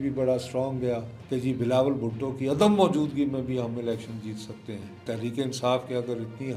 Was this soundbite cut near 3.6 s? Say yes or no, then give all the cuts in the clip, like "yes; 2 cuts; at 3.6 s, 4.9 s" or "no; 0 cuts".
no; 2 cuts; at 1.1 s, 5.0 s